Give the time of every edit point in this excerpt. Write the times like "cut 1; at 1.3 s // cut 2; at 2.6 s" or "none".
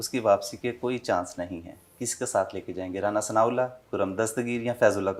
none